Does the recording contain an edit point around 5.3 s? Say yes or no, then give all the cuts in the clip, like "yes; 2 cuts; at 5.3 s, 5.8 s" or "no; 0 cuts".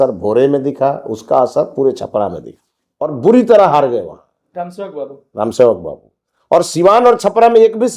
no; 1 cut; at 3.1 s